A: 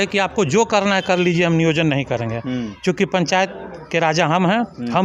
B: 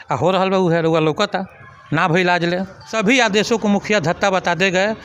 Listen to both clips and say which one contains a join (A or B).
B